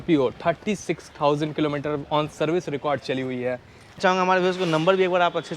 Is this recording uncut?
no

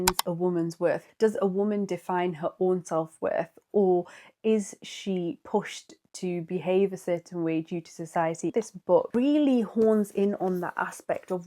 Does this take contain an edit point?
yes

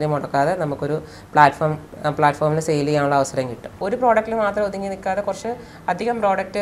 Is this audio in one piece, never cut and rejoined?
no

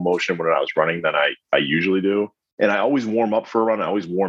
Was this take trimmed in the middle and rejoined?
yes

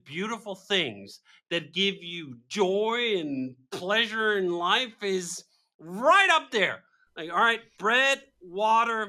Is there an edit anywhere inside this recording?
no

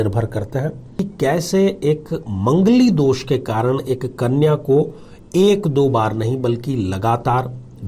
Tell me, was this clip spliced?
yes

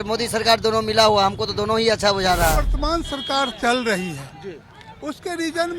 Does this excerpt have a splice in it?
yes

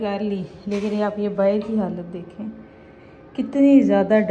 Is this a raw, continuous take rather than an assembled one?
yes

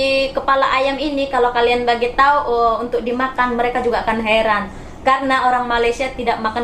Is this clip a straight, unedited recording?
yes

